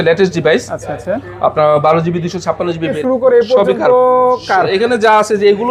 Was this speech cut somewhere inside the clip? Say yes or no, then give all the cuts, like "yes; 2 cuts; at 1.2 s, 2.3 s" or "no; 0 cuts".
yes; 1 cut; at 2.9 s